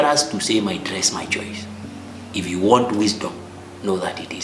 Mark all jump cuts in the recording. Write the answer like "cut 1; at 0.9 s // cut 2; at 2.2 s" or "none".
none